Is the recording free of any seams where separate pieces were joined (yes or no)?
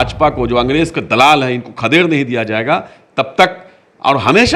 yes